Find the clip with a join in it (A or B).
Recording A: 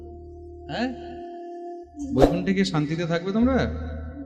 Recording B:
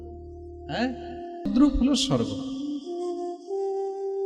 B